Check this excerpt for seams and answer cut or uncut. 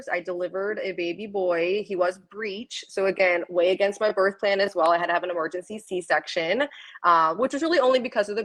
uncut